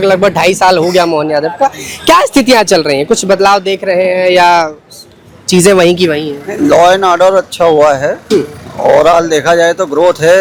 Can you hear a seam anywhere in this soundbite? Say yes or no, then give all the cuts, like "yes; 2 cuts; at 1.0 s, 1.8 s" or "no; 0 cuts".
no; 0 cuts